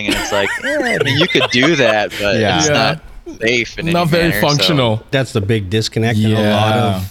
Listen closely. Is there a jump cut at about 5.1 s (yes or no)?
yes